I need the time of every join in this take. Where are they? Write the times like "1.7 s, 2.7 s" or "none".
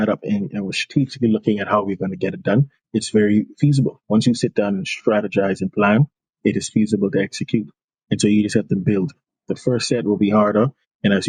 none